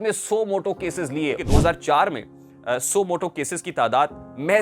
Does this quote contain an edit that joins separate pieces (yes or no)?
yes